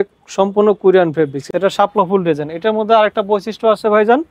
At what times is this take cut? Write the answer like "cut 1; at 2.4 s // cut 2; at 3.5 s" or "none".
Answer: cut 1; at 1.4 s